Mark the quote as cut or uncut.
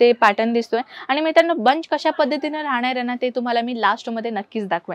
uncut